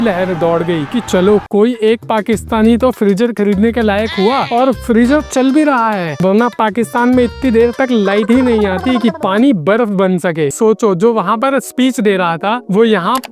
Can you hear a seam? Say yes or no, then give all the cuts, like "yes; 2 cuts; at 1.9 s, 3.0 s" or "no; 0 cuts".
no; 0 cuts